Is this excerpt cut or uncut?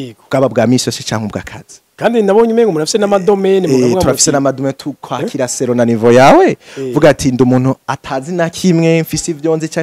uncut